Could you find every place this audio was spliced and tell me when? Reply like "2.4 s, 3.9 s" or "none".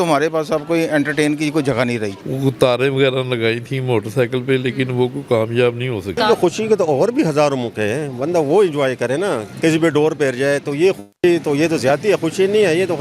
2.2 s, 6.2 s, 9.5 s